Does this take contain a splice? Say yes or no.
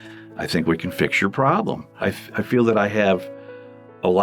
yes